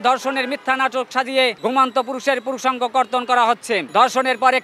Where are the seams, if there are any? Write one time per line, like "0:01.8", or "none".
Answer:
0:01.6
0:03.9